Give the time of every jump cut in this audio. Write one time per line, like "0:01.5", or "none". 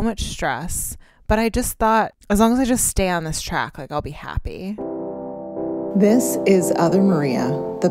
0:02.2
0:04.8